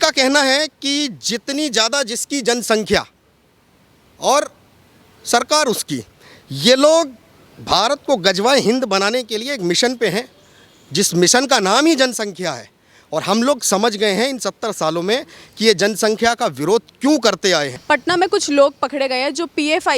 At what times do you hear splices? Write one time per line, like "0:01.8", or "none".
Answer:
none

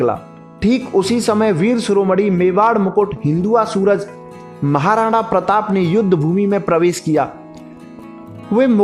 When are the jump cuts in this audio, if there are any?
none

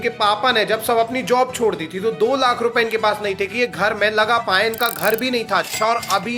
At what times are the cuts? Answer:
none

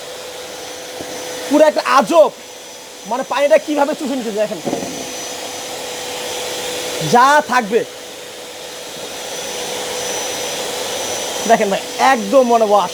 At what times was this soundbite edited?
none

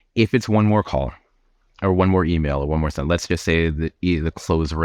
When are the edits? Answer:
none

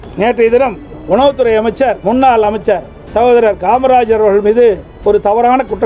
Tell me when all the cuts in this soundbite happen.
0:00.9
0:02.0
0:03.0
0:04.9

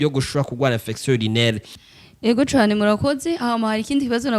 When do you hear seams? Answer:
0:01.7

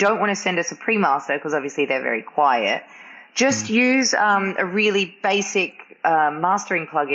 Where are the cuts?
none

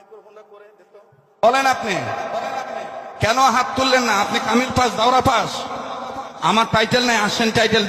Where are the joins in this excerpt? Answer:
0:01.4

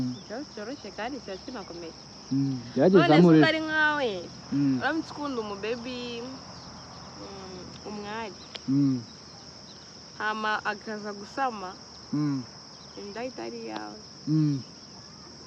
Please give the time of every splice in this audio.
none

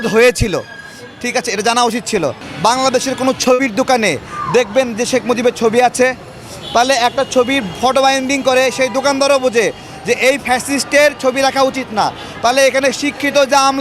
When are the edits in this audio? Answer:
0:02.5

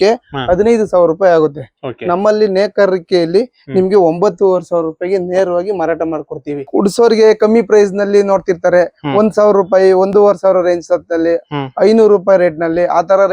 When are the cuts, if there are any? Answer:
0:06.7

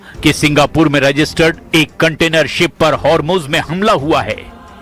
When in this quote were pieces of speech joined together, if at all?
0:00.9

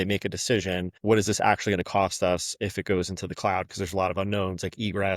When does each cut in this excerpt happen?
0:00.9

